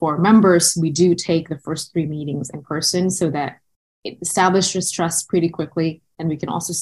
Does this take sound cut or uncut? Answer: uncut